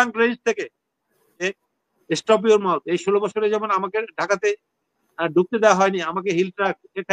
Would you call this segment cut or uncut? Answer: cut